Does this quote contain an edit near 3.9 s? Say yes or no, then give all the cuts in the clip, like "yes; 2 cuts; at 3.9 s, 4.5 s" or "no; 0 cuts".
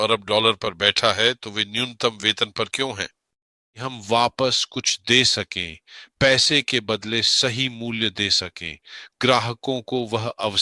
yes; 1 cut; at 3.9 s